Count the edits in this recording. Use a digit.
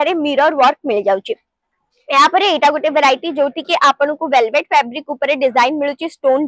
0